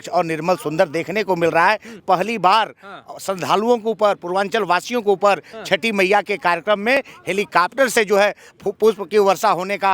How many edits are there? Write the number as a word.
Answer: one